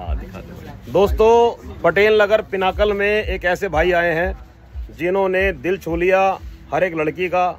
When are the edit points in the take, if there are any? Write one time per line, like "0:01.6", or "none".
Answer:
none